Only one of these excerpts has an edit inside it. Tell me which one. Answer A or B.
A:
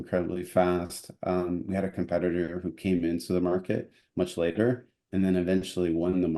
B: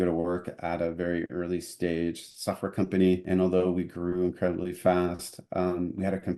B